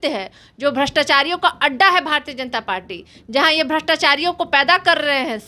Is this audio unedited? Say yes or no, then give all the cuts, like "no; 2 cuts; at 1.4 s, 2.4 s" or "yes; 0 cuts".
yes; 0 cuts